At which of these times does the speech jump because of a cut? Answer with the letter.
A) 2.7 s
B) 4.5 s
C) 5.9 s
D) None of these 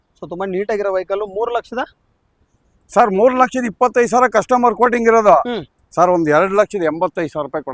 D